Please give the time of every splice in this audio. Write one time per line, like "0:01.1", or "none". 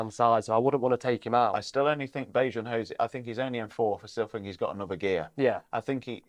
none